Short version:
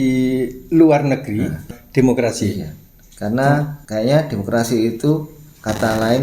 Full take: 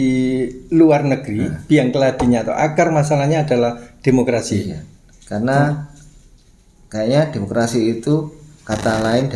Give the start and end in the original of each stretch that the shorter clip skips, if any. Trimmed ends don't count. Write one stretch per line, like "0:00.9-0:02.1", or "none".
0:01.6-0:03.7
0:05.9-0:06.8